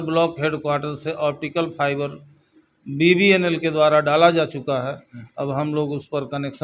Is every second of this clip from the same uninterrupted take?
yes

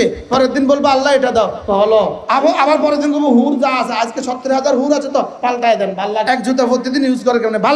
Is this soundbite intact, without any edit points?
no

